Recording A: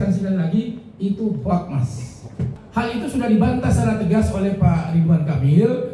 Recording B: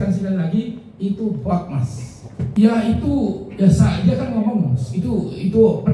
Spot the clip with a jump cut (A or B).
A